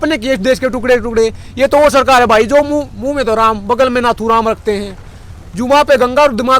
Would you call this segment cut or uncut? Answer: uncut